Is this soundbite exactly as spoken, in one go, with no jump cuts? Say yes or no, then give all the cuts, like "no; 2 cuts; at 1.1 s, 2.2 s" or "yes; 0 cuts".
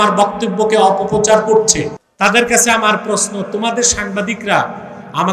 no; 1 cut; at 2.0 s